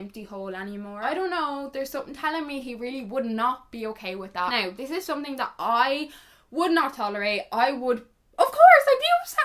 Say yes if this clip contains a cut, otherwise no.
yes